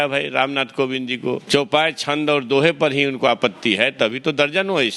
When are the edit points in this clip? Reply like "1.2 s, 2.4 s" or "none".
1.4 s